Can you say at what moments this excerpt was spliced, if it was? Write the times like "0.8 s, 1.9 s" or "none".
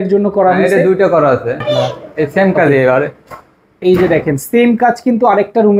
1.6 s